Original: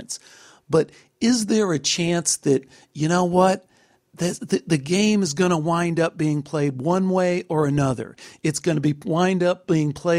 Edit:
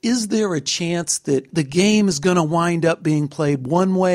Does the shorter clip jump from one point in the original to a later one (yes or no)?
yes